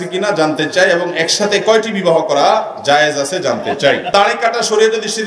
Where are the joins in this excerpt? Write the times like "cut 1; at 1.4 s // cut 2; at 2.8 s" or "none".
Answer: cut 1; at 4.1 s

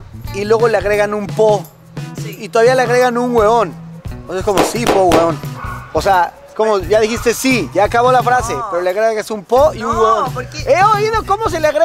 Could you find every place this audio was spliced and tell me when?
none

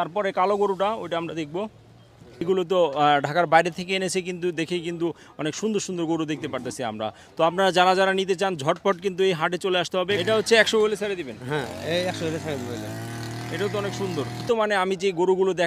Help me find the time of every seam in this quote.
cut 1; at 2.4 s // cut 2; at 10.2 s // cut 3; at 14.4 s

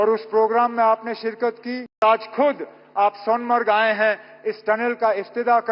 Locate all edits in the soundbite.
cut 1; at 2.0 s

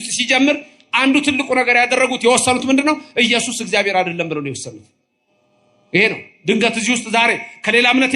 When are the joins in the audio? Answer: none

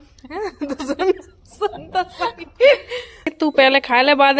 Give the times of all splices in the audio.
cut 1; at 1.8 s // cut 2; at 3.3 s

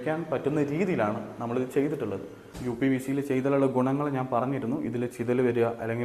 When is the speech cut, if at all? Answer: cut 1; at 2.6 s

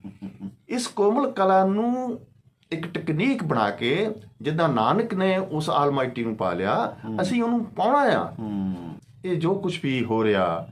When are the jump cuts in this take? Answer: cut 1; at 8.9 s

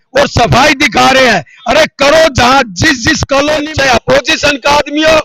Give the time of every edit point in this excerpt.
cut 1; at 3.7 s

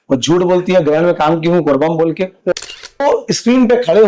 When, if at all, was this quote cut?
cut 1; at 2.5 s

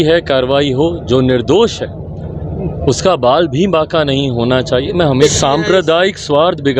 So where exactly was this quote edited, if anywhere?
cut 1; at 5.2 s

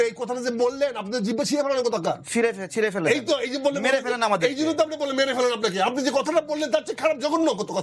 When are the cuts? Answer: none

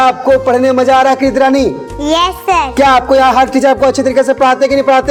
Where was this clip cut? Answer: none

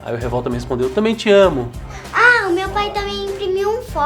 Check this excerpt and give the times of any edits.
cut 1; at 2.1 s

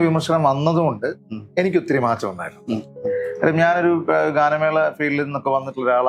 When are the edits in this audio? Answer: none

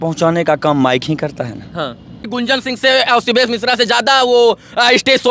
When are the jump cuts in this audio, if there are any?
cut 1; at 2.2 s

